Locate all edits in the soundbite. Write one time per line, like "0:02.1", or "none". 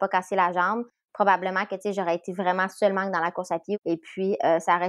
0:03.8